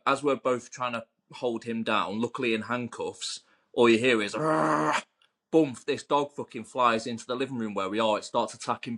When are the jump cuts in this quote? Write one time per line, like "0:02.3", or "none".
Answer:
none